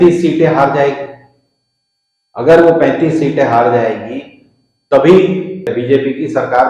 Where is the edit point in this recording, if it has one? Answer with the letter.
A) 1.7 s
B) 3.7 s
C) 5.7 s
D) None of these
C